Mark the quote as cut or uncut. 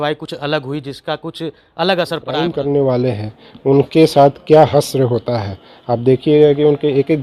cut